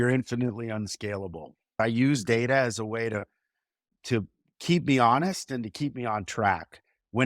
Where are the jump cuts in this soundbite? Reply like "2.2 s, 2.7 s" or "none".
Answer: 1.8 s